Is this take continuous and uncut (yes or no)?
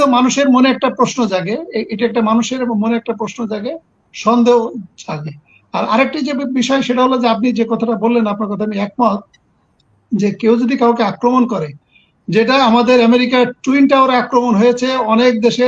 yes